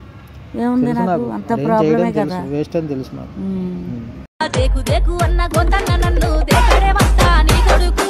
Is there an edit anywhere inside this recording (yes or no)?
no